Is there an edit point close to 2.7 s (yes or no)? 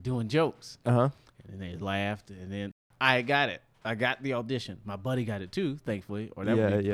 yes